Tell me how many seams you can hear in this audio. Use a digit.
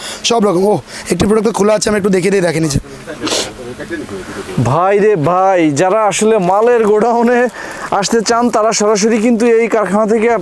0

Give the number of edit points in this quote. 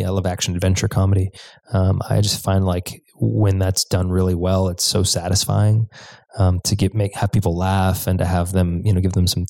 0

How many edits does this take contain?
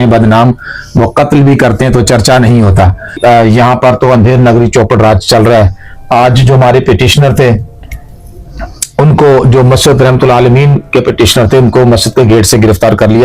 1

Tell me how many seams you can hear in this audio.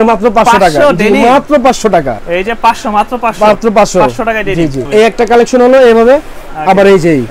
2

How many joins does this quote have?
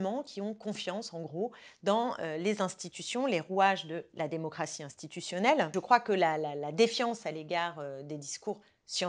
1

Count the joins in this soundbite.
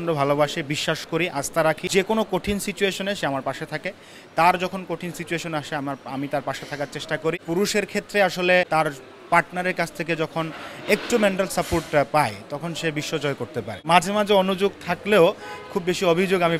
4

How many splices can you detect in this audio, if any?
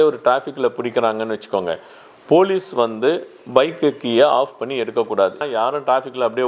1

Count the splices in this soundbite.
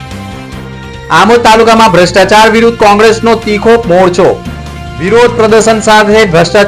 1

